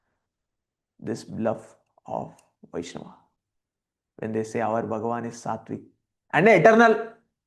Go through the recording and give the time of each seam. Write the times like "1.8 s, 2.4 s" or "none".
none